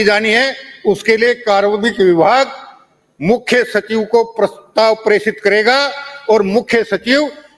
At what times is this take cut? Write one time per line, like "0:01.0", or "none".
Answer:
none